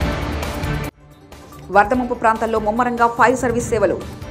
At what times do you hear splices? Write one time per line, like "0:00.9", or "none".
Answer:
0:00.9

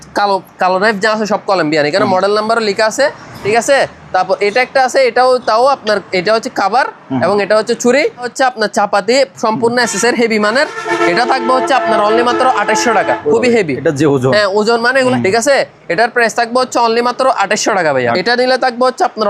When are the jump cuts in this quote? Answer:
0:03.3
0:08.3
0:15.1
0:18.1

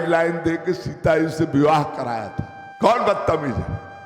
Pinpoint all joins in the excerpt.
0:02.6

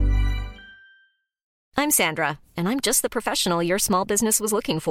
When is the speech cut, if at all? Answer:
0:01.5

